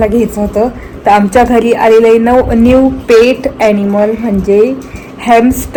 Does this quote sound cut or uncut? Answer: uncut